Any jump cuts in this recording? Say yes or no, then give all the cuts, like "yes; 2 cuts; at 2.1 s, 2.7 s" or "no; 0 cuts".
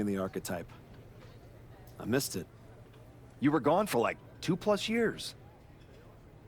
yes; 1 cut; at 5.2 s